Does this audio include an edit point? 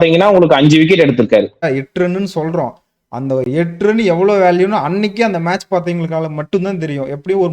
yes; 1 cut; at 1.6 s

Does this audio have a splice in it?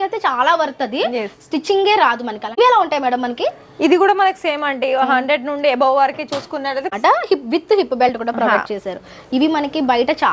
yes; 2 cuts; at 2.6 s, 6.9 s

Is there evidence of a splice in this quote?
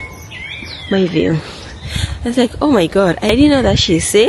yes; 1 cut; at 3.3 s

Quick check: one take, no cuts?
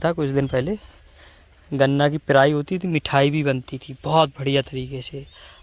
yes; 0 cuts

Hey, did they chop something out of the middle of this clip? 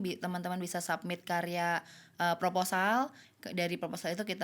yes; 1 cut; at 3.3 s

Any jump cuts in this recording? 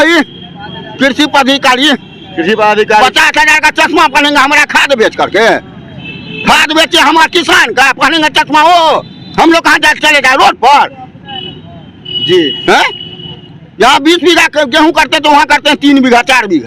no; 0 cuts

